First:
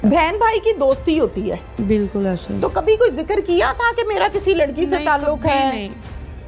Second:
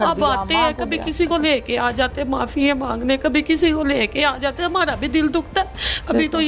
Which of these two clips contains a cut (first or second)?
first